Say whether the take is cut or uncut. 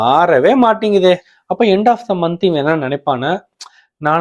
cut